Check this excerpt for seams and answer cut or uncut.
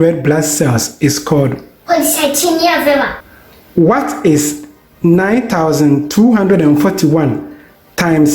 cut